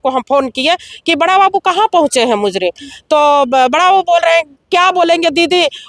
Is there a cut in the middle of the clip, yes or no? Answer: no